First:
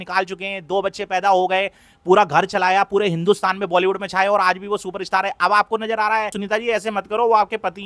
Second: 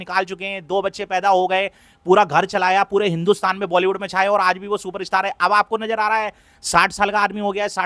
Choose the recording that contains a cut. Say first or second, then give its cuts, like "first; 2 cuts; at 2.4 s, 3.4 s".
first; 1 cut; at 6.4 s